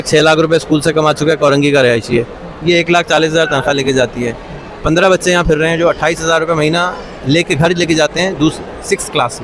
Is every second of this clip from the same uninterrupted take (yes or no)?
yes